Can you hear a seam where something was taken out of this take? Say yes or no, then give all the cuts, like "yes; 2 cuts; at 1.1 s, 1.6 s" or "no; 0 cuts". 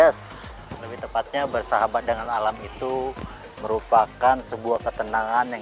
no; 0 cuts